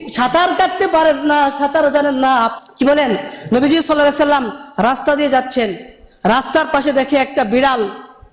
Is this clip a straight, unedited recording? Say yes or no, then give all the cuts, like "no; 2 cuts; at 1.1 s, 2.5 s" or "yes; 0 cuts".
no; 1 cut; at 2.6 s